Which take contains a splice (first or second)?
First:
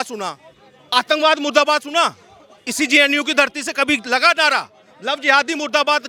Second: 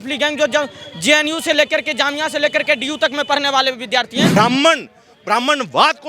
second